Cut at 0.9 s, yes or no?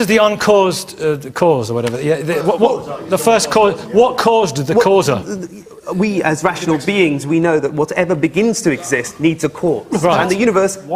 no